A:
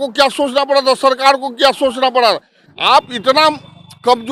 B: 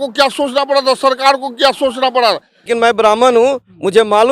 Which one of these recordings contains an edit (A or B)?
B